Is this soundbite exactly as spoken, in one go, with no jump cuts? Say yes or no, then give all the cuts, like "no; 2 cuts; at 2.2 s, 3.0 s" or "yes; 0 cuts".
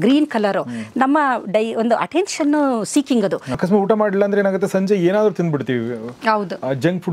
no; 1 cut; at 3.5 s